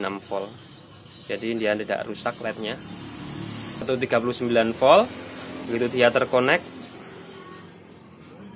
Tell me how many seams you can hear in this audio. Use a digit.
1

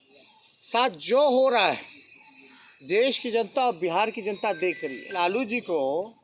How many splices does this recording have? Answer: 1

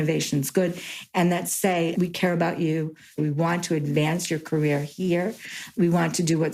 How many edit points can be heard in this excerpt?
2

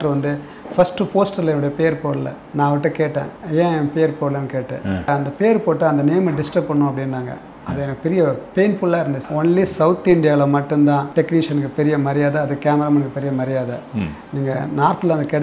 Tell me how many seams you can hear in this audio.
5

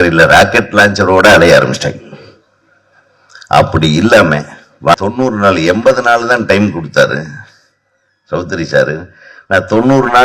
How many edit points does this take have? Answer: 1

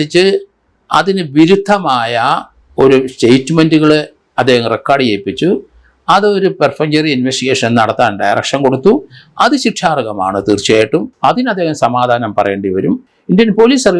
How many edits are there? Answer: 2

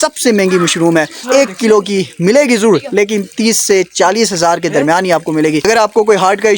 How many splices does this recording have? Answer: 2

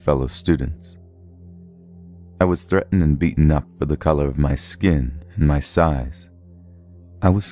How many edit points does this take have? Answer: 1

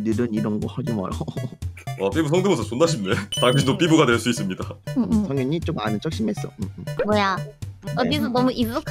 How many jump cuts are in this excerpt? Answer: 1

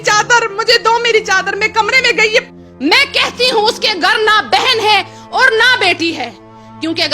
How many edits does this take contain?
1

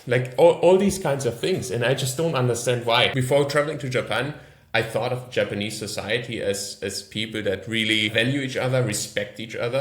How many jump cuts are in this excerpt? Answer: 2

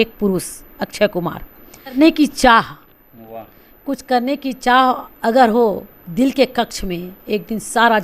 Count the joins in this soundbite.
1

